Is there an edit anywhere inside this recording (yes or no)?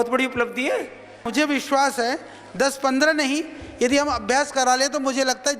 yes